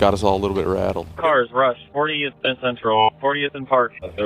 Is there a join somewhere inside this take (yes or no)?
yes